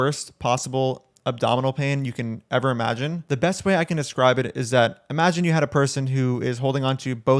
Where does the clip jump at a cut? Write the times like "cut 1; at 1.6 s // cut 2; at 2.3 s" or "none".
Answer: none